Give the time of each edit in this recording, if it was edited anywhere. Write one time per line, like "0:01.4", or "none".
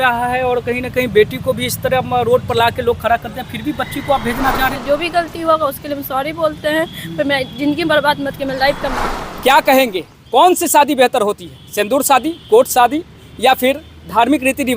0:04.8
0:09.0